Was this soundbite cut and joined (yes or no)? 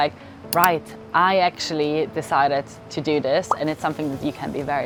no